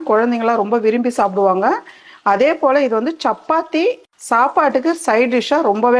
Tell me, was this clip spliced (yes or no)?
yes